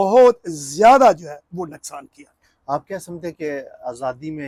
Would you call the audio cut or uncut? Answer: uncut